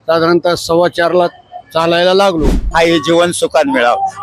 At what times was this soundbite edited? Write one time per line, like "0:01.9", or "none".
0:02.6